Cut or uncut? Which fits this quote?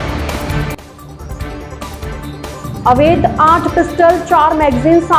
cut